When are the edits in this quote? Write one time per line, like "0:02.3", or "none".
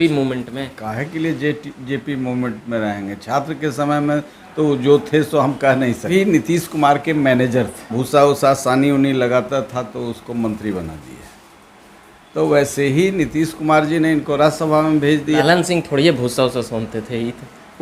0:06.1
0:08.0
0:15.4

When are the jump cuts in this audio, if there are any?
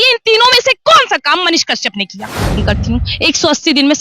0:02.5

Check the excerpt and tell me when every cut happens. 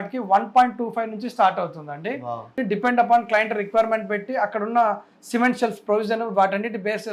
0:02.5

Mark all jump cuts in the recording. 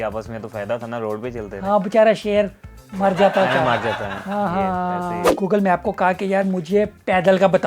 0:05.3

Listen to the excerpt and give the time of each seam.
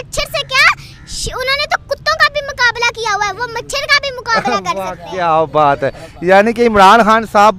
none

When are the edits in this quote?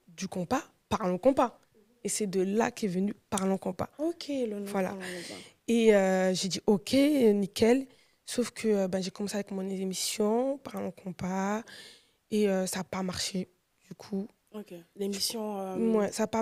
none

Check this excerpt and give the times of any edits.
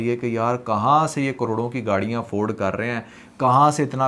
none

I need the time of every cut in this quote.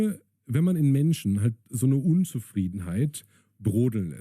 none

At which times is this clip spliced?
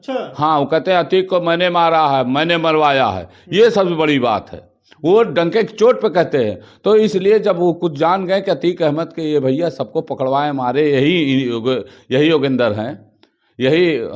none

